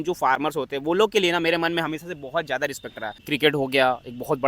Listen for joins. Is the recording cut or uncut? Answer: cut